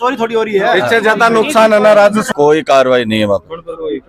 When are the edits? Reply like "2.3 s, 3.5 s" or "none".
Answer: 2.3 s